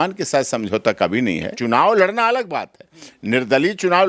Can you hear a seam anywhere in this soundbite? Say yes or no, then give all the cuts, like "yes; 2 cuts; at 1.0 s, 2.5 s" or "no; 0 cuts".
yes; 1 cut; at 1.5 s